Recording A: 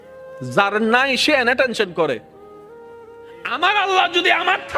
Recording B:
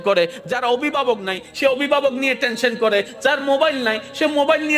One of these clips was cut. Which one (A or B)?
A